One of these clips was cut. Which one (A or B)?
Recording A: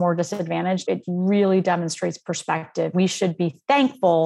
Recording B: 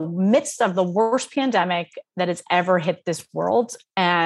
A